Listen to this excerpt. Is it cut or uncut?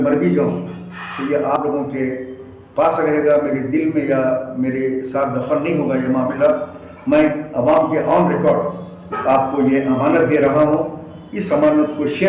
cut